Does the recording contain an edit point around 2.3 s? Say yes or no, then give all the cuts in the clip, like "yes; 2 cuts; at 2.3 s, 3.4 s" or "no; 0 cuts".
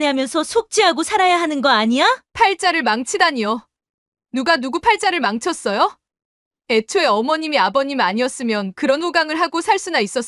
yes; 1 cut; at 2.3 s